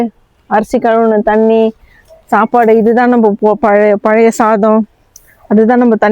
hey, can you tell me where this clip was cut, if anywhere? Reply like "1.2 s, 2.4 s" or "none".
none